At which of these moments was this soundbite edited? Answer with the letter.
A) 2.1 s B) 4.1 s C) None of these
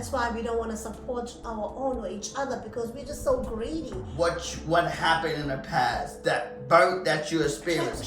B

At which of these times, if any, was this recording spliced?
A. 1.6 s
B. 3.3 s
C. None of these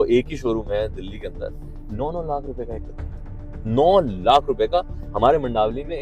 C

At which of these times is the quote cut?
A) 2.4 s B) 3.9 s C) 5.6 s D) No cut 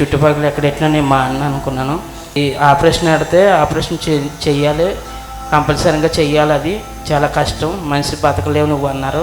A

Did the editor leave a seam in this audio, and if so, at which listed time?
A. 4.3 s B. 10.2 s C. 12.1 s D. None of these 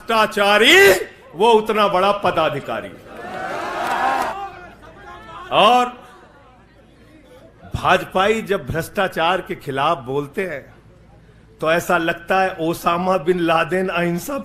A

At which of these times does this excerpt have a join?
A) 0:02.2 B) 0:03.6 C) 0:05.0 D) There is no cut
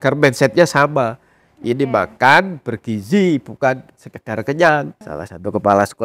C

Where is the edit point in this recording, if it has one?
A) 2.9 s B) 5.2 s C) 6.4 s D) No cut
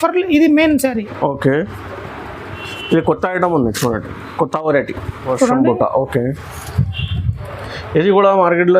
B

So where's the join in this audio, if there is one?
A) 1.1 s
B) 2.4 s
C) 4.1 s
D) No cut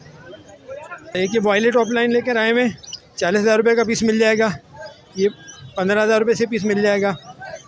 A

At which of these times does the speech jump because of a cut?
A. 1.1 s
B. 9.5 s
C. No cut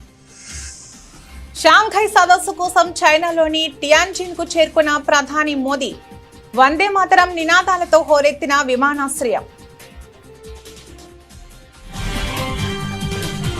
A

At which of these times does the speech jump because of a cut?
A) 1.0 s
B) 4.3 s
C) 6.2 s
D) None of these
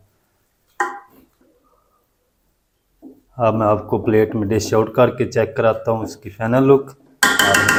D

